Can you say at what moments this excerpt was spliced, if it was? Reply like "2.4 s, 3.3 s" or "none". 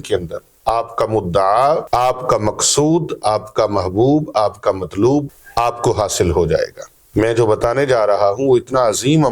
1.8 s, 5.4 s, 7.0 s